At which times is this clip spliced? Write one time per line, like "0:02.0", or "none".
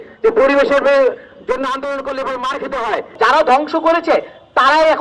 0:03.1